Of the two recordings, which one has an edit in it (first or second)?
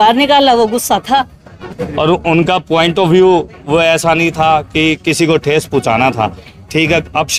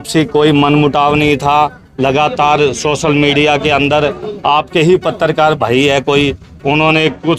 first